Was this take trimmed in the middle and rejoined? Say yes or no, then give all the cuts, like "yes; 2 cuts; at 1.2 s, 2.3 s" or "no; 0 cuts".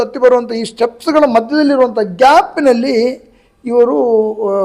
no; 0 cuts